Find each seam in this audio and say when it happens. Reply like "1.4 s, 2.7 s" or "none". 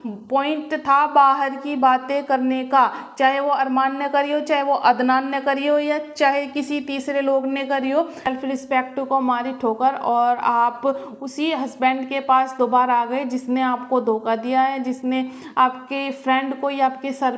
8.3 s